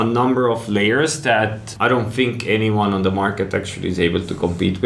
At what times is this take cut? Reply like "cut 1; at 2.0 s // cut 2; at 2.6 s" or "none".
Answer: cut 1; at 1.7 s